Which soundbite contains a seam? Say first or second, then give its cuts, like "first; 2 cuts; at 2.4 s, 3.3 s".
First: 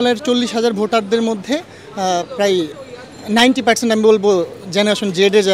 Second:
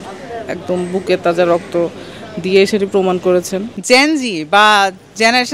second; 1 cut; at 3.6 s